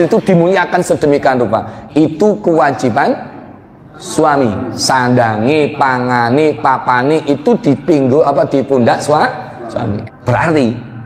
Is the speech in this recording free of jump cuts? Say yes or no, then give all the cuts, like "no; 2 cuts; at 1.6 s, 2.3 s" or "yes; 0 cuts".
no; 1 cut; at 10.0 s